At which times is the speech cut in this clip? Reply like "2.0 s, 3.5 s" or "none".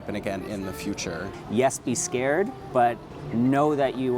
1.3 s, 2.6 s